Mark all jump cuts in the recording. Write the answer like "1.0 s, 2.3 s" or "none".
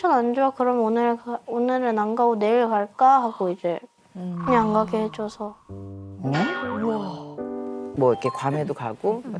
7.8 s